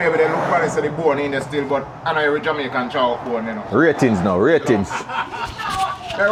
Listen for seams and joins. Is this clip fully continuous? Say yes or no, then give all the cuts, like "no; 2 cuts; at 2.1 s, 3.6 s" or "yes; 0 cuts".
yes; 0 cuts